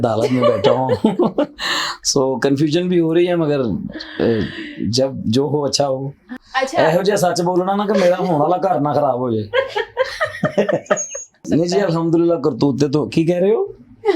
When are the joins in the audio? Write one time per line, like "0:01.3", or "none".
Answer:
0:06.3
0:11.4